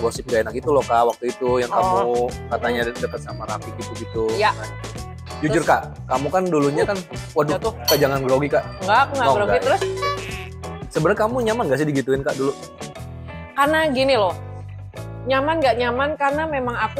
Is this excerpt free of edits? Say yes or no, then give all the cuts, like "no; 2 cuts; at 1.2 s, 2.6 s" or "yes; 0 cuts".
yes; 0 cuts